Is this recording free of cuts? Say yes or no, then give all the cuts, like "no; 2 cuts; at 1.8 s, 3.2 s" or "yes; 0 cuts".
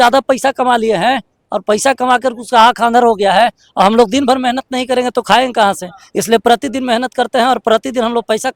yes; 0 cuts